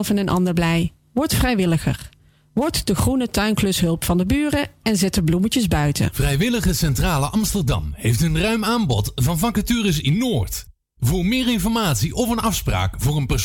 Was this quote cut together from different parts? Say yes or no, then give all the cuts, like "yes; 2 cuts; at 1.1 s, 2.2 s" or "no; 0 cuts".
yes; 1 cut; at 6.1 s